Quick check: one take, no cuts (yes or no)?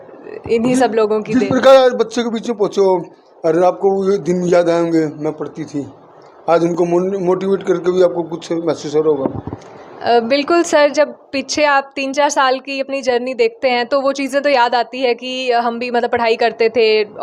yes